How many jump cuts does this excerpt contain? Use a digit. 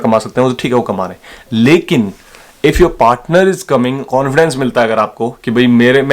1